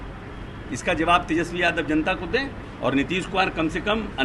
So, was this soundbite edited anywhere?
yes; 1 cut; at 2.6 s

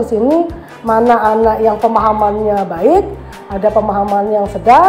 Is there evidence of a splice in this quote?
no; 0 cuts

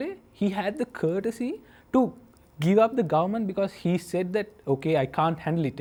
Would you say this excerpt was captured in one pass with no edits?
yes; 0 cuts

